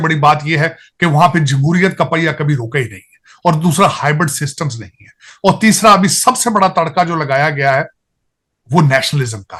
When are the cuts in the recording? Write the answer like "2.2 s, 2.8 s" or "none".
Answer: none